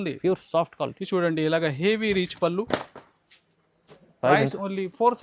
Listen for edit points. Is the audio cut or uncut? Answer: cut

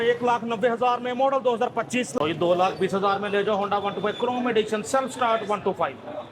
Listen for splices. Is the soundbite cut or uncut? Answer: cut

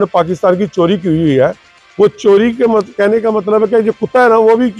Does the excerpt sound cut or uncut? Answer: uncut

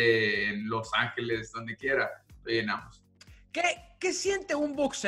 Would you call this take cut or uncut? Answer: uncut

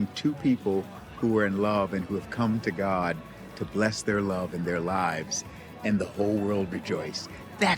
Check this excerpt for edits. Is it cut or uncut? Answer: uncut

